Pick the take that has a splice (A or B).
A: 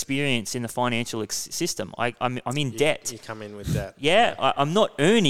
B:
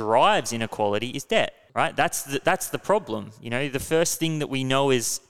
B